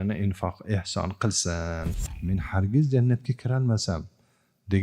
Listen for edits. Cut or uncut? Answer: cut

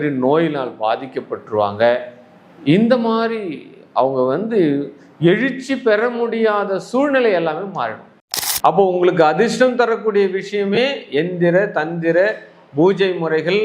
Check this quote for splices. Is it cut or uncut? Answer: cut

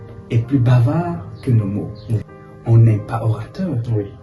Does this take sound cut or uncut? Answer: cut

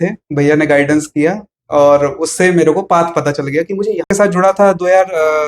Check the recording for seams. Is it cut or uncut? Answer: cut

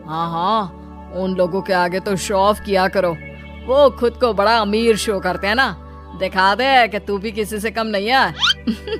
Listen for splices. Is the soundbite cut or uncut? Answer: uncut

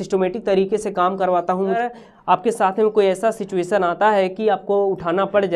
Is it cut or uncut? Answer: cut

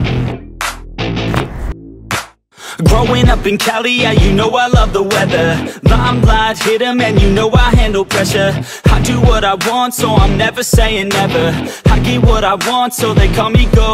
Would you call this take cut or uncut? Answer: uncut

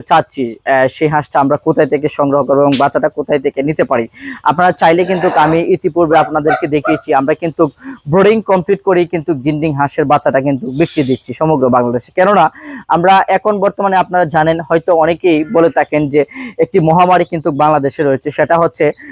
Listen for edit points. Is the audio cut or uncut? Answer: uncut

